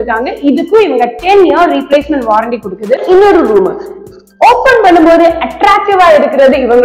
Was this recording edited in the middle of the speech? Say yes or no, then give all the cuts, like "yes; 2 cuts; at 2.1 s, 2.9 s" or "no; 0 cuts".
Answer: yes; 1 cut; at 3.0 s